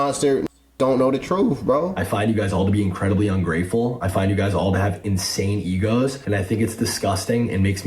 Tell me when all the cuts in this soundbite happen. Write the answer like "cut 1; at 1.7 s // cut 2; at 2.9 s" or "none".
cut 1; at 1.9 s // cut 2; at 6.2 s